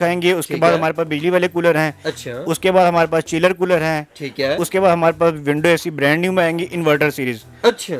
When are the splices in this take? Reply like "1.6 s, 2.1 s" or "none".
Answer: none